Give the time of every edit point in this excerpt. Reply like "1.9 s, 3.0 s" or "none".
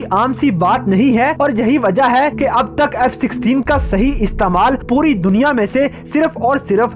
none